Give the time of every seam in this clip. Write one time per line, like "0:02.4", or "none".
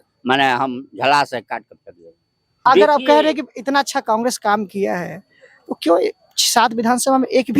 0:02.6